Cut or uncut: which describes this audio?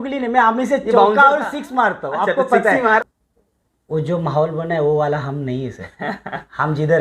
cut